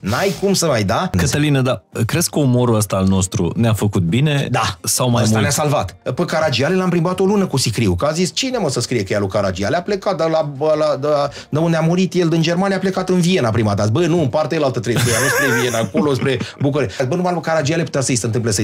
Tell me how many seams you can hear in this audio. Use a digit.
3